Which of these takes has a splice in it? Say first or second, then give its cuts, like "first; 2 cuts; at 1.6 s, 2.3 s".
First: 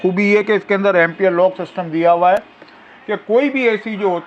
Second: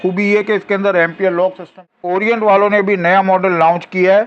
second; 1 cut; at 1.9 s